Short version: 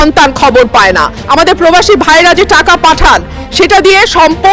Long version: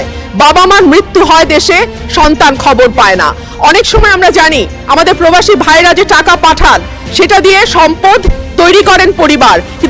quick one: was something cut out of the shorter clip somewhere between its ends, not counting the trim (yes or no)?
yes